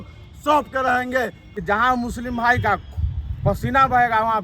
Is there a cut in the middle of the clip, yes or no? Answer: yes